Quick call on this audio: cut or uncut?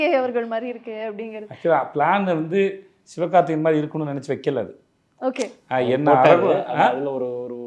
uncut